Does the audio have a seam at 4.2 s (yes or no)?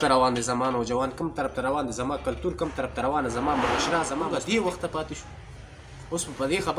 yes